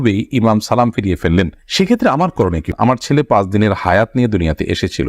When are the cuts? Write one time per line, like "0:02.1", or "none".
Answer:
0:02.6